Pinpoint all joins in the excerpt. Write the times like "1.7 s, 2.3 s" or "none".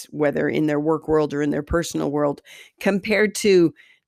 none